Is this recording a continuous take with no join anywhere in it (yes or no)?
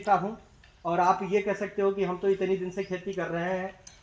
yes